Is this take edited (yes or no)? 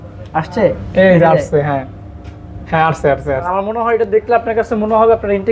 yes